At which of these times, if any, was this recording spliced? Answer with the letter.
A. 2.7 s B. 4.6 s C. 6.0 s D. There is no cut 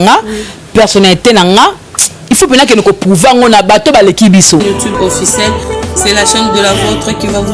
B